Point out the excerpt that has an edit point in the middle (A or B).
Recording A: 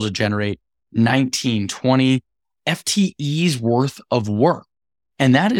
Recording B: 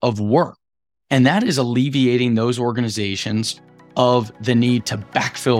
A